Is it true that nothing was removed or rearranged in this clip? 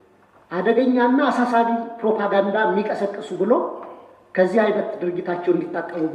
yes; 0 cuts

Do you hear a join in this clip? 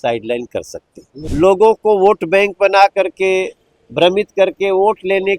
yes; 1 cut; at 1.2 s

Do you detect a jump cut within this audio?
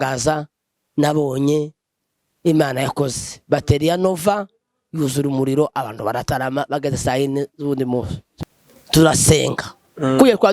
yes; 1 cut; at 8.2 s

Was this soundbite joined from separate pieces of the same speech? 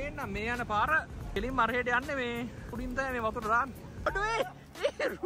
yes; 3 cuts; at 1.3 s, 2.7 s, 4.1 s

